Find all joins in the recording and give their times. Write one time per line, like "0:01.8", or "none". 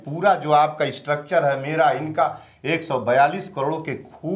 none

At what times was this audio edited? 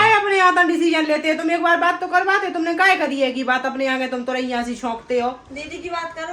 none

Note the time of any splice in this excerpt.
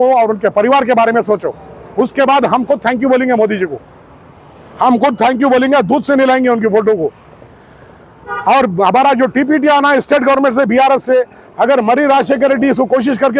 none

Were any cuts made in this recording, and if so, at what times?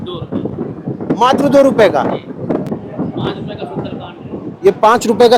0:02.7

